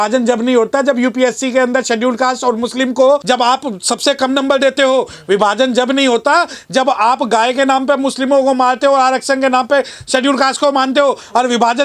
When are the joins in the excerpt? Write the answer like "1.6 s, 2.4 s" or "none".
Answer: 3.2 s